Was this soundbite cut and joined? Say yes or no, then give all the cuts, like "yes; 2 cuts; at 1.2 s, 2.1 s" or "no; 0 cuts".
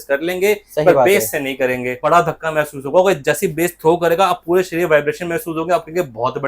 yes; 1 cut; at 2.0 s